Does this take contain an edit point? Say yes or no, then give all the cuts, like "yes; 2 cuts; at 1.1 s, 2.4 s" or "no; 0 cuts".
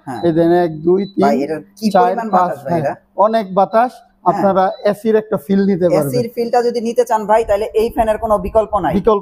no; 0 cuts